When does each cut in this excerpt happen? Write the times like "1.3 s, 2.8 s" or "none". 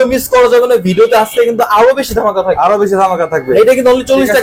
3.5 s